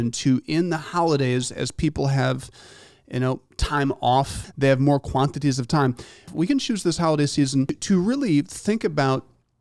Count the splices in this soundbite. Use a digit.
3